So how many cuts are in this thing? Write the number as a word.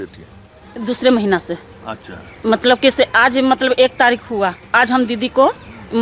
zero